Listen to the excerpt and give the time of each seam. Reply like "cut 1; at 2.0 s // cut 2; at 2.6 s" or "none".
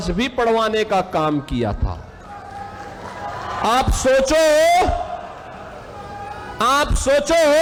none